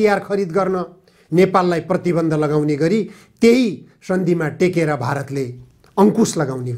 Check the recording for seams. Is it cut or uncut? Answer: uncut